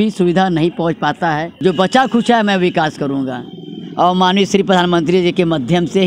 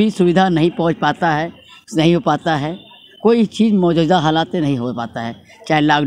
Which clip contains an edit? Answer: first; 1 cut; at 1.5 s

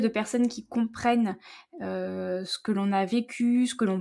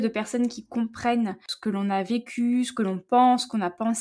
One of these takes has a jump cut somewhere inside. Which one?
second; 1 cut; at 1.5 s

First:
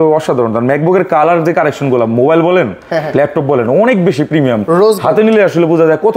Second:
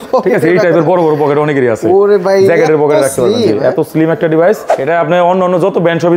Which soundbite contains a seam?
second; 1 cut; at 4.7 s

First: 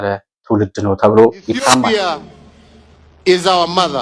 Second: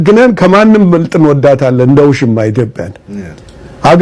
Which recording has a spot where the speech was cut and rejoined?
first; 1 cut; at 1.9 s

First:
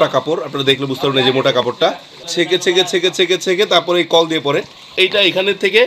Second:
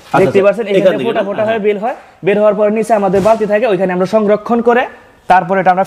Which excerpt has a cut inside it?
first; 2 cuts; at 2.2 s, 4.9 s

